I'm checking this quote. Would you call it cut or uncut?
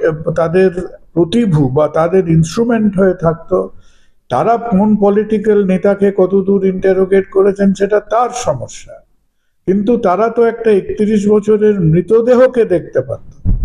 uncut